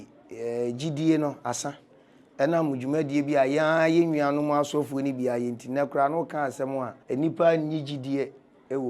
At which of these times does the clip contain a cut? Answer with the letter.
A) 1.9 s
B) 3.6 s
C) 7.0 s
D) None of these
C